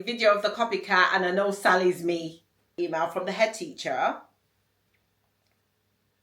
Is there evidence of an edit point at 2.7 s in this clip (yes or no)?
yes